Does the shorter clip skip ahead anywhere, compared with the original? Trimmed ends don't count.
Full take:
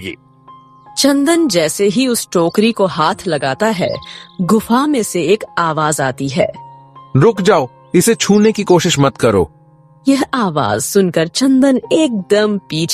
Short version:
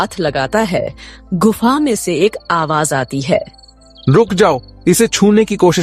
no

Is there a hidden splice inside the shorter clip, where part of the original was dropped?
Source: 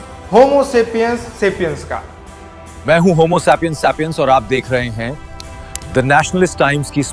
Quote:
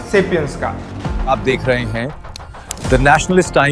yes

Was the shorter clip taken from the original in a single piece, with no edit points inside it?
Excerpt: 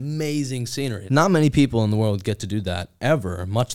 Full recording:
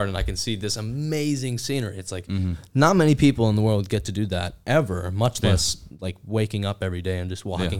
no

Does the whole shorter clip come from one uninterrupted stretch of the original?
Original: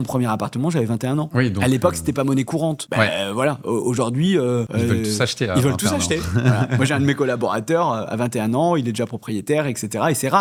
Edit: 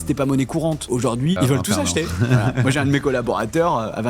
no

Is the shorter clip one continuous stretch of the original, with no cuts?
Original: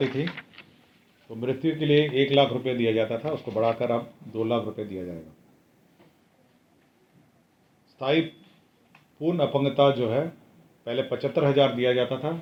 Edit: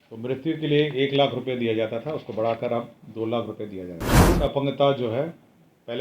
no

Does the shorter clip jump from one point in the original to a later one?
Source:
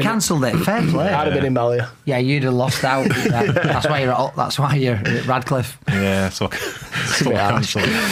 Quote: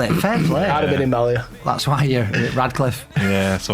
yes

